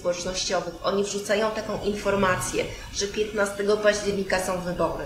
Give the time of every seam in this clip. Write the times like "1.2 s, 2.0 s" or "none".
none